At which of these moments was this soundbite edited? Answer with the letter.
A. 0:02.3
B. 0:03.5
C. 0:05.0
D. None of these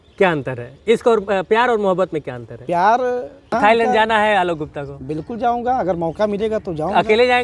B